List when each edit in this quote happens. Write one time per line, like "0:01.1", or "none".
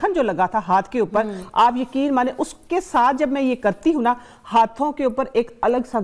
none